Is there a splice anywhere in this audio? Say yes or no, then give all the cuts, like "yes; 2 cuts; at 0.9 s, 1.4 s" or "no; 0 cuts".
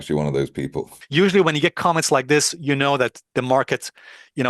yes; 1 cut; at 1.0 s